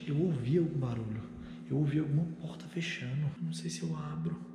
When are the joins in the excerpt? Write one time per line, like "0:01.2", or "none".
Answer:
0:03.3